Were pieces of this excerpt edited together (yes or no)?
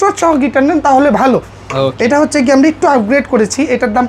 no